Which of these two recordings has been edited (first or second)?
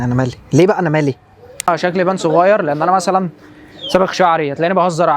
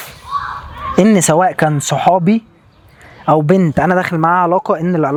first